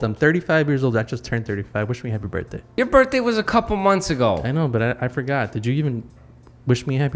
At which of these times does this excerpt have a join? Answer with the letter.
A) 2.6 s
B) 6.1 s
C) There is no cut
A